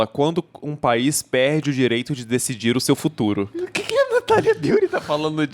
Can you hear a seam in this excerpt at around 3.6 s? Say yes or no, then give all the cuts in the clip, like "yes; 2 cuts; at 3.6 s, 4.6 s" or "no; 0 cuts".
no; 0 cuts